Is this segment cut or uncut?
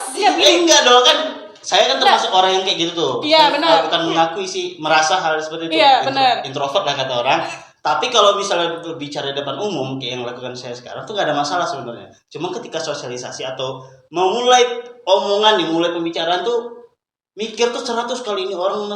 uncut